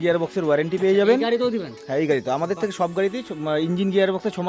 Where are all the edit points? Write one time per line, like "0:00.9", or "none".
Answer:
none